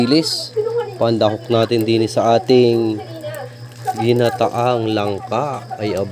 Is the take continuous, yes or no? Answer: yes